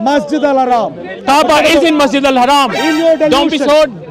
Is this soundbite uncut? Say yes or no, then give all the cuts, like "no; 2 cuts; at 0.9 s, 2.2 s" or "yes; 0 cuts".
yes; 0 cuts